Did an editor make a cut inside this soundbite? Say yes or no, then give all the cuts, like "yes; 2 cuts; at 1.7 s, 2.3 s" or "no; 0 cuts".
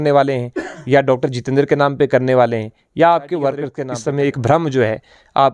no; 0 cuts